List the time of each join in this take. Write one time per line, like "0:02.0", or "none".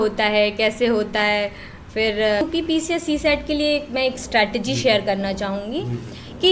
0:02.4